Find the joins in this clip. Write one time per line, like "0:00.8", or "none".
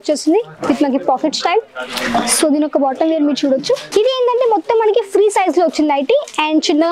0:03.8